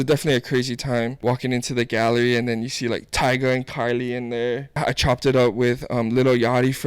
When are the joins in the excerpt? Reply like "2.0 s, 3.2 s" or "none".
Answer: 1.2 s, 4.7 s

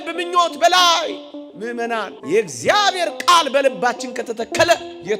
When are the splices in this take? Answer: 2.1 s

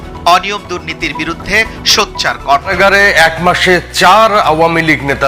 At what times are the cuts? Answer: 2.7 s

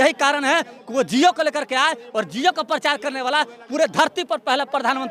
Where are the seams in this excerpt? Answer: none

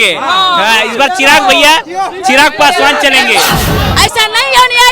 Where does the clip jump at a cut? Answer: 3.6 s

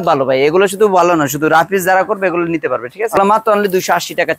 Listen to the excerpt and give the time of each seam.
3.2 s

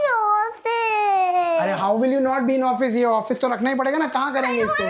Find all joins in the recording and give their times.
none

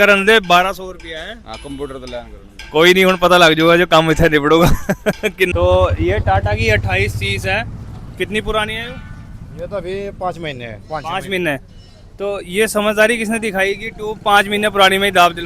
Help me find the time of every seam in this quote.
5.5 s

